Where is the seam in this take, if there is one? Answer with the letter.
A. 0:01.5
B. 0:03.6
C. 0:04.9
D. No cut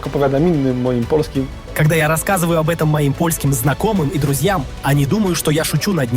A